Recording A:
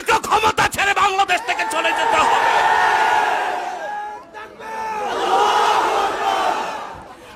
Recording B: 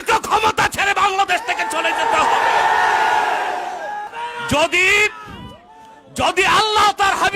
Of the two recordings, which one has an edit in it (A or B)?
B